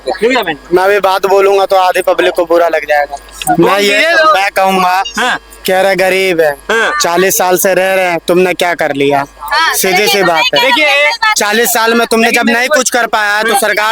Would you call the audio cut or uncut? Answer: uncut